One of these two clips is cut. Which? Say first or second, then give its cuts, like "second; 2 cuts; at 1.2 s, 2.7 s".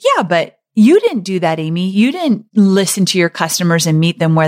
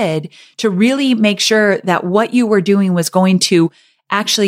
first; 1 cut; at 2.4 s